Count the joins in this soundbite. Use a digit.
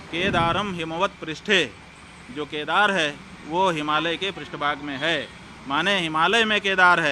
0